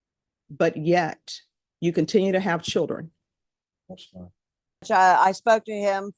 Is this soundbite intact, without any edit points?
no; 1 cut; at 4.9 s

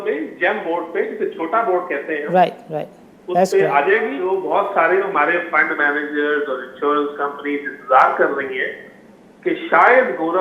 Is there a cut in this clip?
yes; 1 cut; at 4.3 s

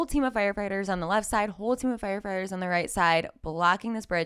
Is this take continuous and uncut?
yes; 0 cuts

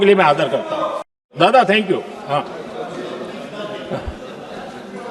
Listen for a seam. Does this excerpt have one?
yes; 1 cut; at 1.3 s

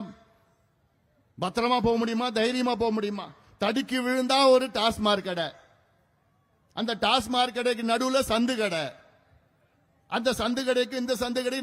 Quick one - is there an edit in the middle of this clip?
no; 0 cuts

